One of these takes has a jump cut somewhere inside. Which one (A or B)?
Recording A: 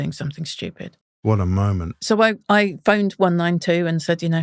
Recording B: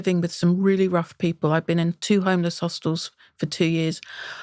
A